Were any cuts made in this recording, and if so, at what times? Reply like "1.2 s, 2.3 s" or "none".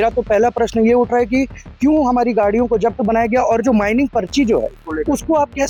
none